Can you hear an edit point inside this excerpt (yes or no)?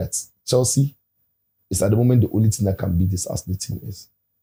no